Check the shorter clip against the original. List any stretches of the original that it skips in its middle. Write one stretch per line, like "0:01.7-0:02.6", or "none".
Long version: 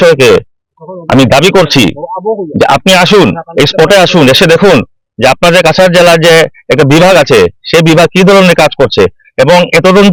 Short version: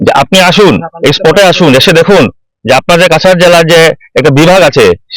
none

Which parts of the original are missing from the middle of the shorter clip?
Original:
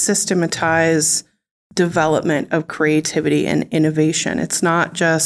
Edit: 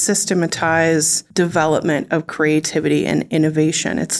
0:01.2-0:01.6

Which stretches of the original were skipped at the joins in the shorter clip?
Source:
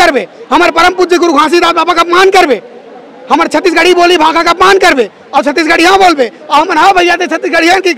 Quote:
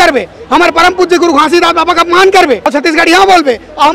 0:02.6-0:05.4

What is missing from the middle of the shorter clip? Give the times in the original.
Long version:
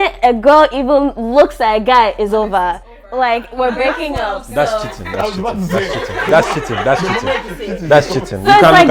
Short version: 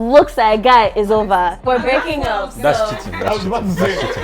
0:02.8-0:03.5

